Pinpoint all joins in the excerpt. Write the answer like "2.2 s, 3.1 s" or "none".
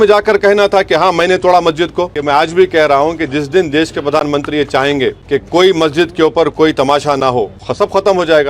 2.2 s, 5.2 s, 7.6 s